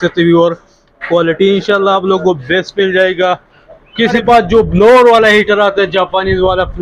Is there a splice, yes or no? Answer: yes